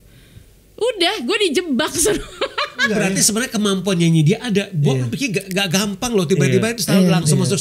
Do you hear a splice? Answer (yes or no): yes